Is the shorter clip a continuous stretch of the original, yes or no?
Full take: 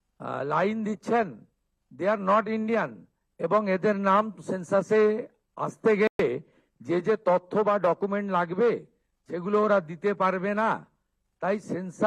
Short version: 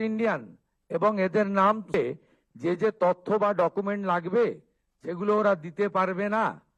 no